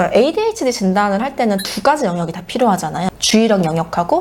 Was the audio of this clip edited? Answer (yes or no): no